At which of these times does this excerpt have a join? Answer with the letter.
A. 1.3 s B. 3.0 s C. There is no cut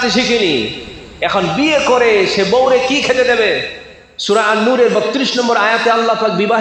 C